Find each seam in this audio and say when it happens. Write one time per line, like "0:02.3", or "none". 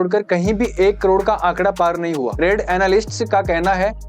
none